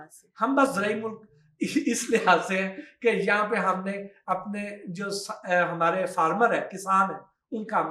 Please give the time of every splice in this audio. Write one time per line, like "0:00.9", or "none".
none